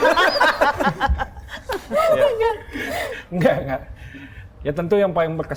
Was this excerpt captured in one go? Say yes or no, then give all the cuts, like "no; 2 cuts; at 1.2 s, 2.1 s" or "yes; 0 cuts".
yes; 0 cuts